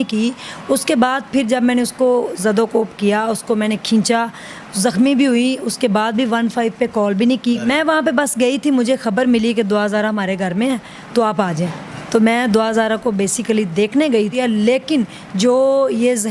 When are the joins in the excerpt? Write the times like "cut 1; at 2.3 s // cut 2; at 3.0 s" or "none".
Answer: cut 1; at 7.6 s // cut 2; at 14.3 s